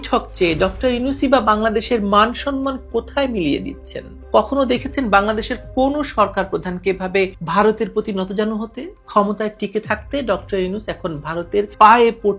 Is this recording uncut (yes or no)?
yes